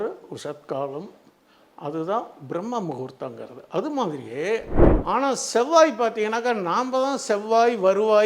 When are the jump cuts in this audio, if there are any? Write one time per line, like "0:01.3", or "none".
0:04.8